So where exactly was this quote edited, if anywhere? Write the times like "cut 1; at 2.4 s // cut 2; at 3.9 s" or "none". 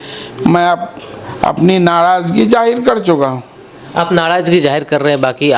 none